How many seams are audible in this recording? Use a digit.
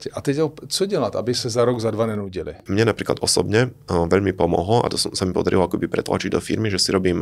1